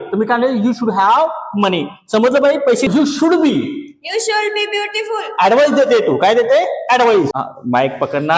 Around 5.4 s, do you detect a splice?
no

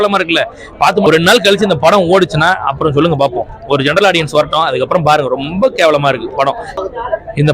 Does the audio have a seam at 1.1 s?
yes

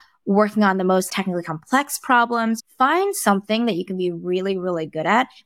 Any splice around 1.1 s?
yes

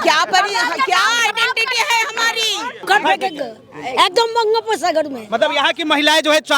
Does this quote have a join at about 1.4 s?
no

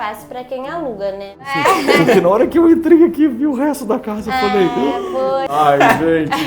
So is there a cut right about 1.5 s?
yes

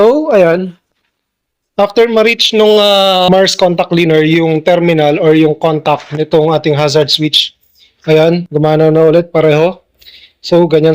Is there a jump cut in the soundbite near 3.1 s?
yes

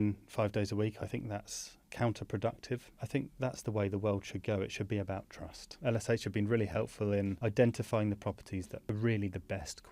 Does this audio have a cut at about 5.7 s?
yes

